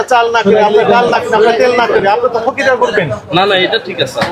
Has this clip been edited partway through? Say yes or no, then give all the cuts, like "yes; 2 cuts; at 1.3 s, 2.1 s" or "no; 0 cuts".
no; 0 cuts